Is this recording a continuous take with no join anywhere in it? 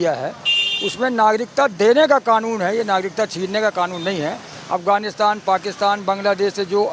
yes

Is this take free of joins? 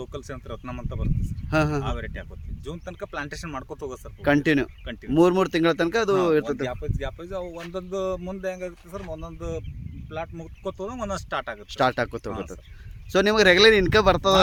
yes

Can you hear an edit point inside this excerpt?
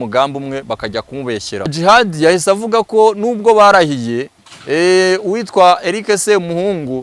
yes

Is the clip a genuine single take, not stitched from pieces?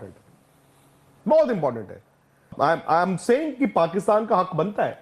no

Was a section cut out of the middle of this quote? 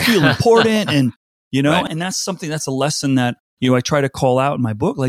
yes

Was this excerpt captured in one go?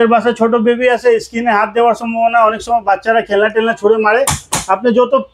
yes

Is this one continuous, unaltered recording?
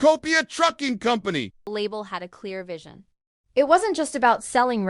no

